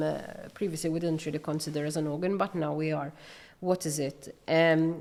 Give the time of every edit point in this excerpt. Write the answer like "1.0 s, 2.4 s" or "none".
none